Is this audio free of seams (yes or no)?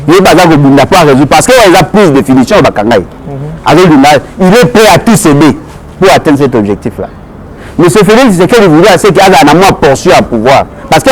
yes